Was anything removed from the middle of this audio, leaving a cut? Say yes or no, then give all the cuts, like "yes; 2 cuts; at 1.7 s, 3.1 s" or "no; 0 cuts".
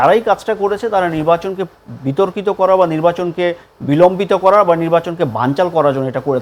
no; 0 cuts